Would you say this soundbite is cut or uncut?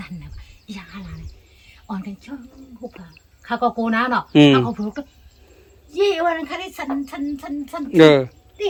uncut